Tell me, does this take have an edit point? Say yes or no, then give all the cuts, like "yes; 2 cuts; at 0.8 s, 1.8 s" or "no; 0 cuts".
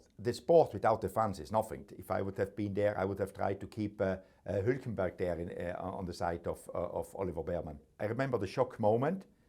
yes; 2 cuts; at 1.9 s, 7.8 s